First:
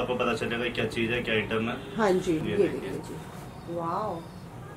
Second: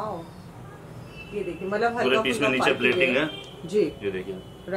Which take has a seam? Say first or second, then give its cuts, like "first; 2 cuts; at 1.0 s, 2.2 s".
first; 1 cut; at 2.4 s